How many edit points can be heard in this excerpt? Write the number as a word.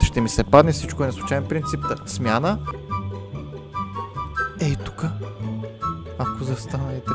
one